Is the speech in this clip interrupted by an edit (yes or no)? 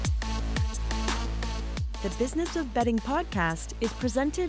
no